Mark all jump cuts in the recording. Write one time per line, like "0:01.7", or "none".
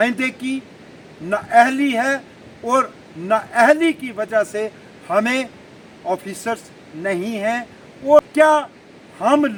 none